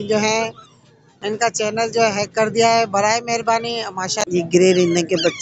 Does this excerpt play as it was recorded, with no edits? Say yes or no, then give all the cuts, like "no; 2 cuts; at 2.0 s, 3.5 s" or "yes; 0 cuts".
no; 1 cut; at 4.2 s